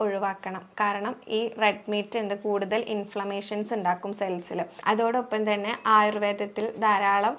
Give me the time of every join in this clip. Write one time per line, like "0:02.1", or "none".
0:04.7